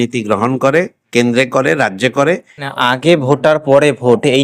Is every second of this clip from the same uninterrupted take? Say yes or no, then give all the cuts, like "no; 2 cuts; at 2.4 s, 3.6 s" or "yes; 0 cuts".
no; 1 cut; at 2.6 s